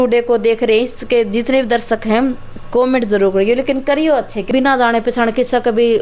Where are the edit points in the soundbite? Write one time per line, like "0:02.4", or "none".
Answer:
0:04.5